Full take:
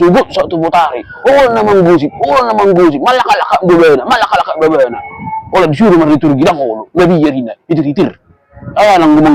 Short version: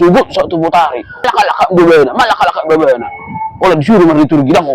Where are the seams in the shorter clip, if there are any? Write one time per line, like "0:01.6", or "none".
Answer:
0:01.2